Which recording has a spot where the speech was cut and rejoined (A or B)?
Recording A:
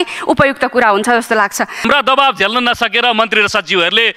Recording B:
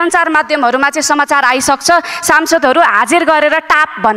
A